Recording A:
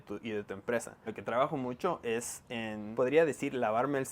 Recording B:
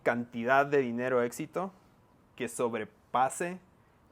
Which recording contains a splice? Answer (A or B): A